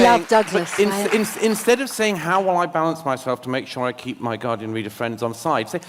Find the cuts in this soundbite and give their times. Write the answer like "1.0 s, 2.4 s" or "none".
none